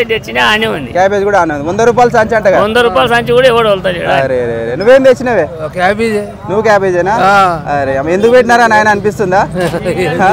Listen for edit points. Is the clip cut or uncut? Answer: uncut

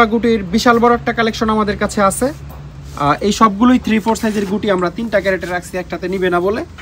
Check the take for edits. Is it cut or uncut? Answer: uncut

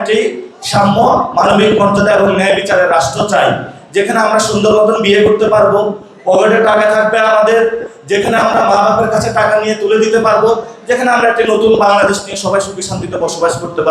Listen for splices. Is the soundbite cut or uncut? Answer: uncut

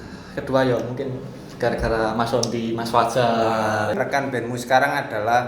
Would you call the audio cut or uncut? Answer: cut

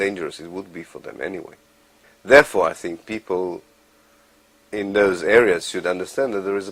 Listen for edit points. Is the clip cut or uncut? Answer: uncut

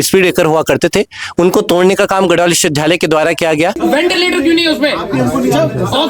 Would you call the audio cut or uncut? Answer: cut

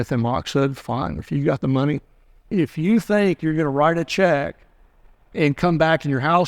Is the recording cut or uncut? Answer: cut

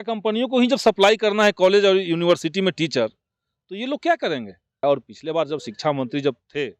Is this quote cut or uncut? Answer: cut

